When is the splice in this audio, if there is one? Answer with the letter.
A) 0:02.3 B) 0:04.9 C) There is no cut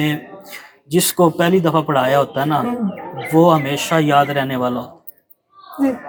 C